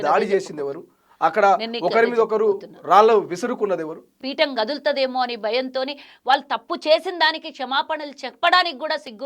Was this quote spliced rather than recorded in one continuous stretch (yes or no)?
yes